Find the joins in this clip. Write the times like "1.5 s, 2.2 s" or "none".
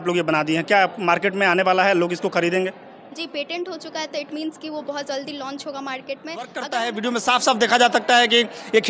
6.6 s